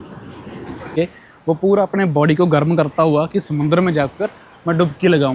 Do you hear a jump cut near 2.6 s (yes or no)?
no